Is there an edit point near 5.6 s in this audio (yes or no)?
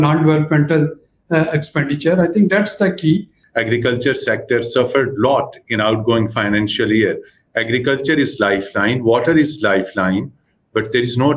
no